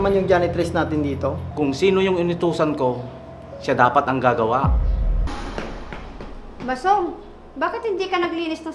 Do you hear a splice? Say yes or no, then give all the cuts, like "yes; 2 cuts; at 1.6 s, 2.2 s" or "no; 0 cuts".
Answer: yes; 2 cuts; at 1.4 s, 5.3 s